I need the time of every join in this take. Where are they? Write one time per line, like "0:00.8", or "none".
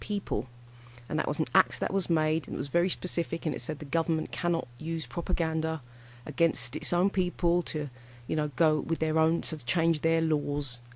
0:04.3